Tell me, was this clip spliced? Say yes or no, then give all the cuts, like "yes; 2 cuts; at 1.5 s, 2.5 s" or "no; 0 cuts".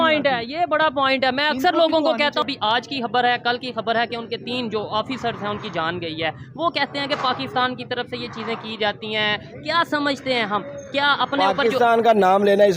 yes; 1 cut; at 2.4 s